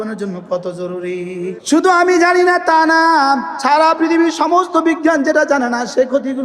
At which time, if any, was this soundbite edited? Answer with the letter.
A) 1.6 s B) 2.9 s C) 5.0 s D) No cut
A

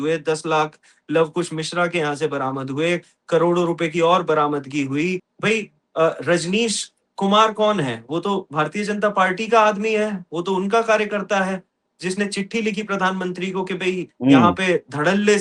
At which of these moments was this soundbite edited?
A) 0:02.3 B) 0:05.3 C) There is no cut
B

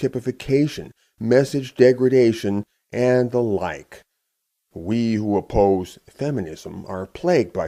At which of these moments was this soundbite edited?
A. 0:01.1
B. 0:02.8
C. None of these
B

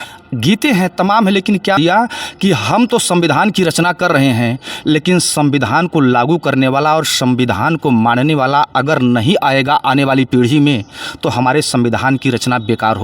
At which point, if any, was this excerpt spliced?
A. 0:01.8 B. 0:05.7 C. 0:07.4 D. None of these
A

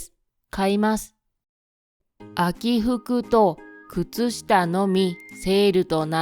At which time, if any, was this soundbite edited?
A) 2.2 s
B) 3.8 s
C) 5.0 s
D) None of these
D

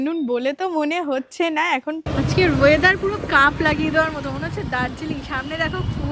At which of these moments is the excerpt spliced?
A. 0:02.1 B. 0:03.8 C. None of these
A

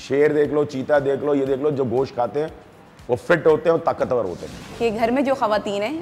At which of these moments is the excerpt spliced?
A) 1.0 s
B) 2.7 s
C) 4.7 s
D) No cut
C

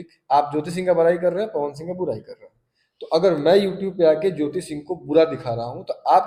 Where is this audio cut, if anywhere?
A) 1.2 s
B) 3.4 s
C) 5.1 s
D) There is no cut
D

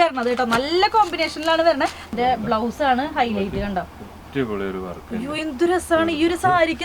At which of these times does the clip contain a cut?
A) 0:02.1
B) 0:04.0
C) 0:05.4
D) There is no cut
A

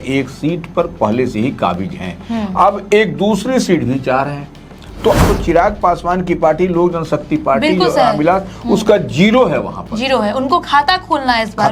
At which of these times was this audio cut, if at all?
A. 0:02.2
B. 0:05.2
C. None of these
B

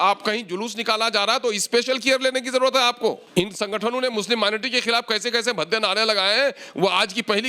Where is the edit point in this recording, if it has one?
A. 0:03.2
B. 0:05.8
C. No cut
A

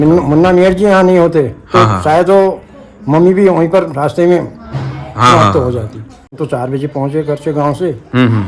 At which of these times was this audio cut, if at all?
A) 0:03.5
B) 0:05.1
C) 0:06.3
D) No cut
C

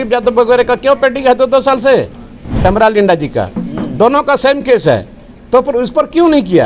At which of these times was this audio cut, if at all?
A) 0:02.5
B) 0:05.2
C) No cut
A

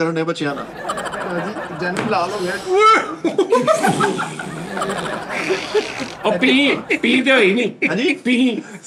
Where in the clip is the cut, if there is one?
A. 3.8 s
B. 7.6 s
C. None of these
C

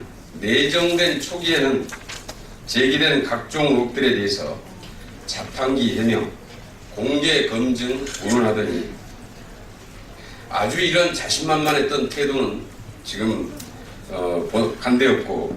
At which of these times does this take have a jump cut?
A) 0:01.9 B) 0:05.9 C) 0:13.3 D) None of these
A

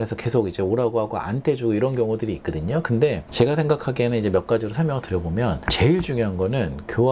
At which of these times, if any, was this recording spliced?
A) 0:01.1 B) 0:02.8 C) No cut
C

